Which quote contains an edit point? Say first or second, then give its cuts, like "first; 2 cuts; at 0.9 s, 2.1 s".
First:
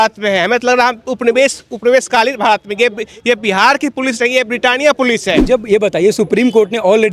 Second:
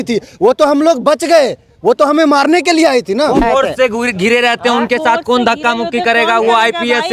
first; 1 cut; at 5.4 s